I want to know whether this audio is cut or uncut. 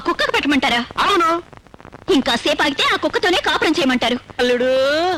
uncut